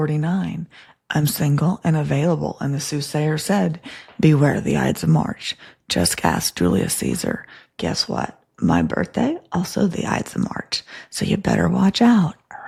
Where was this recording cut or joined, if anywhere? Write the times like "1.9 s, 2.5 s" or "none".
none